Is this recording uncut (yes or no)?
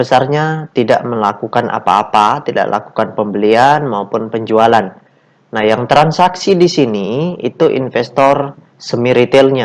yes